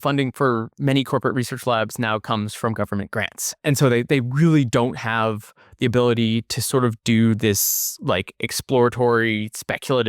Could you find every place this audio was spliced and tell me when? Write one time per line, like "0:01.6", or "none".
0:03.6